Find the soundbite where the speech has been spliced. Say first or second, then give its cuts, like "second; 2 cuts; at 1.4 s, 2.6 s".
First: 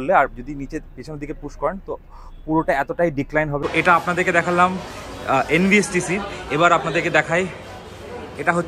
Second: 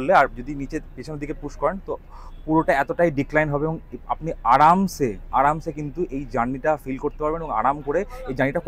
first; 1 cut; at 3.6 s